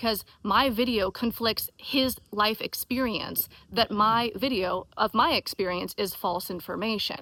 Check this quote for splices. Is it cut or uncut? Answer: uncut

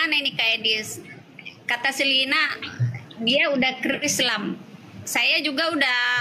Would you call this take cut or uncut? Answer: uncut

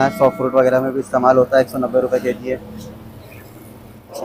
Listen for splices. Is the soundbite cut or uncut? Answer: uncut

